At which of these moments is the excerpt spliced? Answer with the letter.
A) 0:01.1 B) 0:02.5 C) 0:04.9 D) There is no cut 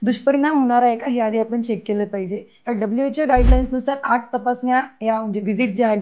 B